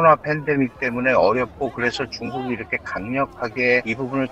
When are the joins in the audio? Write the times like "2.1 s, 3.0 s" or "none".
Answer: none